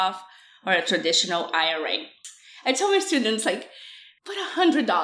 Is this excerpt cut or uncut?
cut